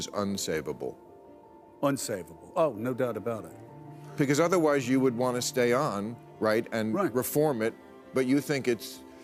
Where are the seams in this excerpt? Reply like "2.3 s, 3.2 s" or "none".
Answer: none